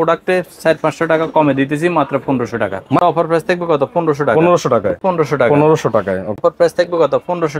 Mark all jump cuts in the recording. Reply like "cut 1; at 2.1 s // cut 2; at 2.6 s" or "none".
cut 1; at 3.0 s // cut 2; at 5.0 s // cut 3; at 6.4 s